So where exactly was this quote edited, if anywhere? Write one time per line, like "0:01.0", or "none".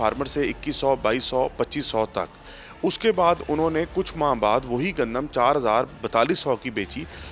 none